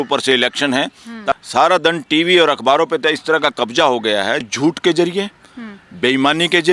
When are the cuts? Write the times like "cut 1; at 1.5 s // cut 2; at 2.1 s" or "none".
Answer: cut 1; at 1.3 s // cut 2; at 4.5 s